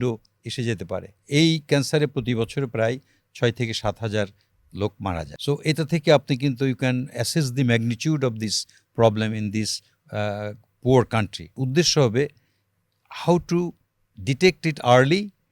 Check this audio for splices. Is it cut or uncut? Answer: cut